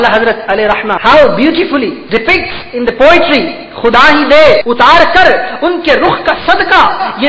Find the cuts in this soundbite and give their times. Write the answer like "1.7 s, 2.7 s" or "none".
0.9 s, 2.0 s, 4.6 s